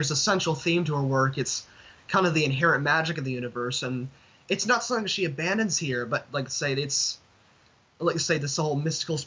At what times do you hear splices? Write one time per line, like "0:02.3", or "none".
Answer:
none